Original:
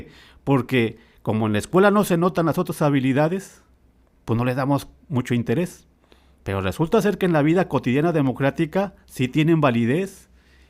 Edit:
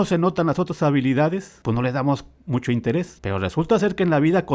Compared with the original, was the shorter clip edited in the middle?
yes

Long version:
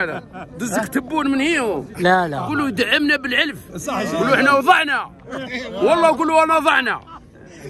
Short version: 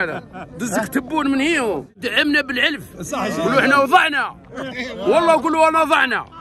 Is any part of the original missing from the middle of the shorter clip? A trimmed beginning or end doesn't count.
yes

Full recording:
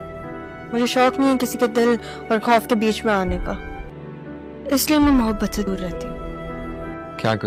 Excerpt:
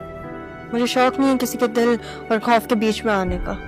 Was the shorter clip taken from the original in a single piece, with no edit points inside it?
yes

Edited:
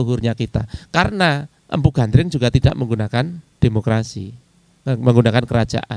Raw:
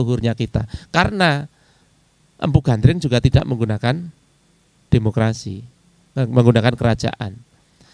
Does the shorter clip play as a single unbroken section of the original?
no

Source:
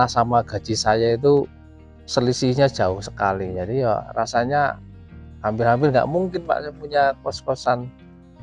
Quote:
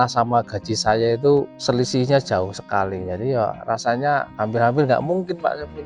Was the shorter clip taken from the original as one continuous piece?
no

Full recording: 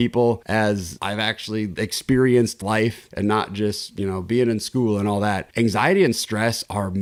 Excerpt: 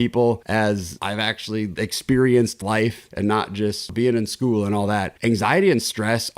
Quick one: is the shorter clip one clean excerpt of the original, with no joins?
no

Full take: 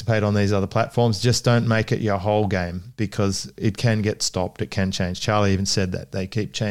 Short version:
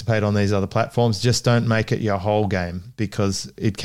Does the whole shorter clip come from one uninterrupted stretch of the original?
yes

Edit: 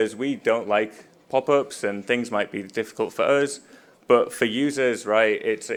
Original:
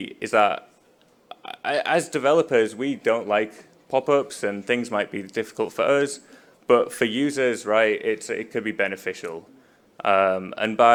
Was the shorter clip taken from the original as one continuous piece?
yes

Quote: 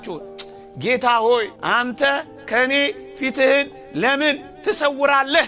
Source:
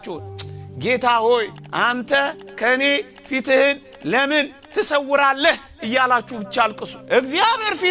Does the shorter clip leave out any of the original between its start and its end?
yes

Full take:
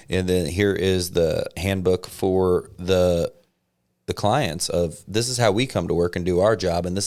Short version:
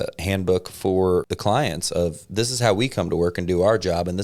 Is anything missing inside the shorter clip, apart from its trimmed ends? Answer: yes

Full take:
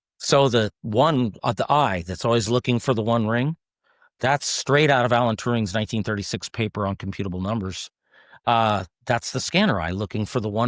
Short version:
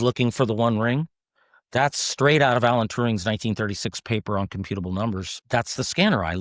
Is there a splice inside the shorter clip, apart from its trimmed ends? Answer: yes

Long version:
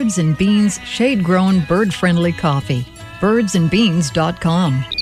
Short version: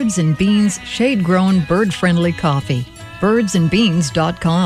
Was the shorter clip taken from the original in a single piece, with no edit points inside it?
yes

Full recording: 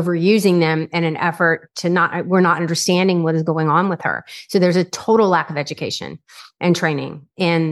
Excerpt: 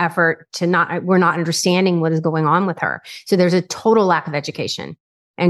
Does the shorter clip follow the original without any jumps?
yes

